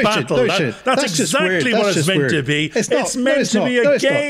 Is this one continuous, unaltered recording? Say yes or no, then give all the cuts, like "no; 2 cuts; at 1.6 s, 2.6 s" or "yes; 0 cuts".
yes; 0 cuts